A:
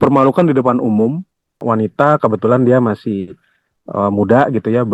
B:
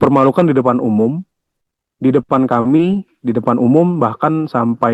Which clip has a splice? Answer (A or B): A